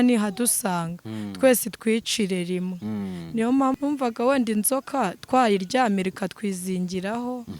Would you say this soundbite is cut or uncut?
cut